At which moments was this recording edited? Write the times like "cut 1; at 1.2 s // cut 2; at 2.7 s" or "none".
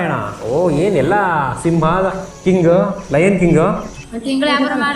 cut 1; at 3.9 s